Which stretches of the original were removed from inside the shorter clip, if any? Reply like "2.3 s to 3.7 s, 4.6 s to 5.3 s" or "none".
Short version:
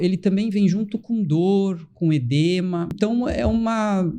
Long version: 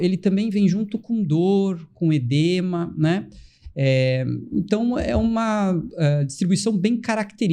3.0 s to 4.7 s